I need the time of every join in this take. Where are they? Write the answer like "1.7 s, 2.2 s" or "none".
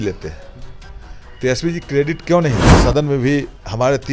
2.7 s